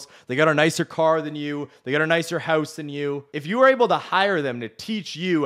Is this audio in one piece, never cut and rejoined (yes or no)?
no